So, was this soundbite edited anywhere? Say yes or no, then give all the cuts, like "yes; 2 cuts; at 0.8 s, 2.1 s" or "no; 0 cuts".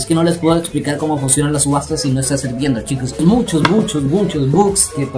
yes; 1 cut; at 3.2 s